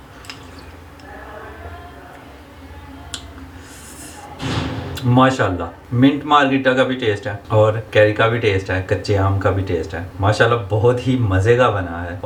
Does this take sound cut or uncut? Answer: uncut